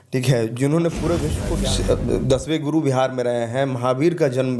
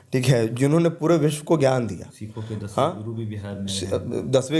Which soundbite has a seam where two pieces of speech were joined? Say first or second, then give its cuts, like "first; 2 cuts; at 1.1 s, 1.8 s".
first; 1 cut; at 1.4 s